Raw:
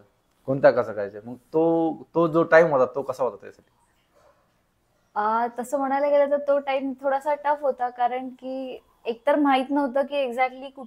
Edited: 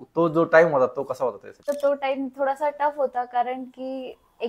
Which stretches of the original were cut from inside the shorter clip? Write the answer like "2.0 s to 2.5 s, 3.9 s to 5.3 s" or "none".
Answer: 3.7 s to 6.3 s

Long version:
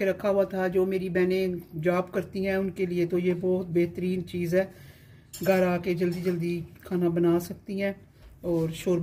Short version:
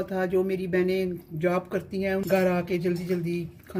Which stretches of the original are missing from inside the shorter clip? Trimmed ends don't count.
2.7 s to 5.4 s

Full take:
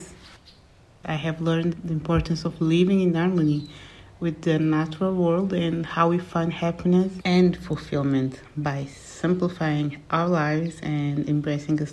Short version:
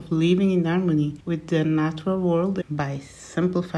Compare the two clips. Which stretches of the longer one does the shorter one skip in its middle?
3.7 s to 4.1 s, 5.5 s to 8.5 s

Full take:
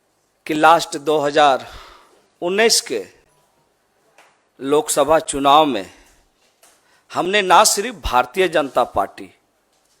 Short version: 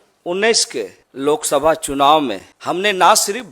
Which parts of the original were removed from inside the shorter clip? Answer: 3.2 s to 4.5 s, 5.9 s to 7.0 s

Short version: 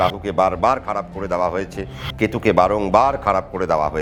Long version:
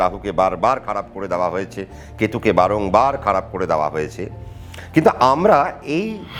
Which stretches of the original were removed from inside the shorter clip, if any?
none

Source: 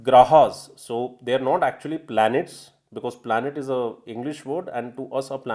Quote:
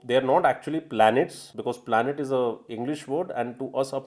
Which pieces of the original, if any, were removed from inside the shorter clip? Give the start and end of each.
2.6 s to 2.8 s

